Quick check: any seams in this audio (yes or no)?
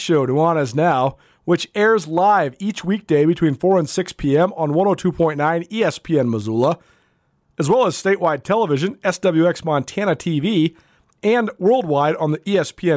no